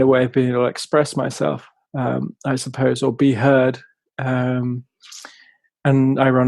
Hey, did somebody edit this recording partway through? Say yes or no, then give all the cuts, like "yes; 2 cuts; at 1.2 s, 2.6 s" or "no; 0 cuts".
no; 0 cuts